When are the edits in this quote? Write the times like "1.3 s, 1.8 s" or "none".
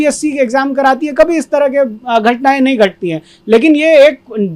none